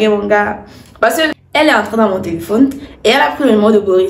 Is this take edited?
yes; 1 cut; at 1.4 s

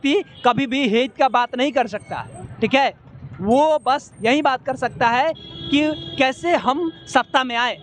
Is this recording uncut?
yes; 0 cuts

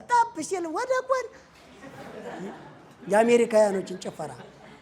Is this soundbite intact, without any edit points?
yes; 0 cuts

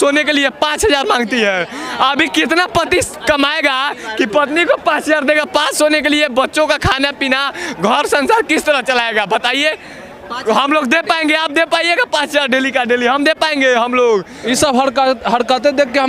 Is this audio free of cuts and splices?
yes; 0 cuts

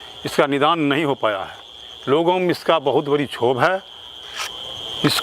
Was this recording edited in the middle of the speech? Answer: no; 0 cuts

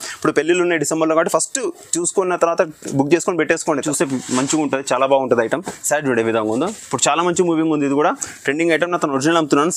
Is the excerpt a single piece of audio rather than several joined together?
no; 1 cut; at 3.8 s

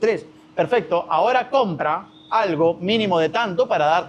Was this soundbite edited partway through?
no; 0 cuts

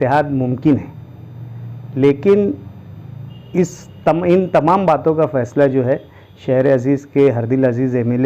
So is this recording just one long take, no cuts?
yes; 0 cuts

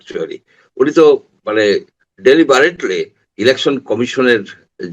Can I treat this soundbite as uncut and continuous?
no; 1 cut; at 1.4 s

